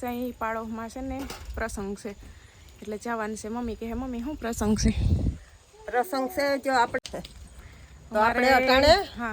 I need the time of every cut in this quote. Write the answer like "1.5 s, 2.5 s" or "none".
7.0 s